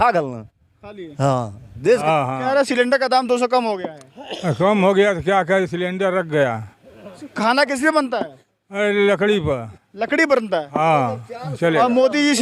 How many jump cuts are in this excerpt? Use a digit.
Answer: 0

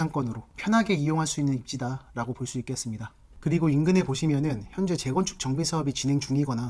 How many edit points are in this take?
0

